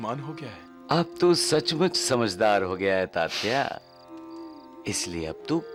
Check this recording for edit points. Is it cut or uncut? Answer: uncut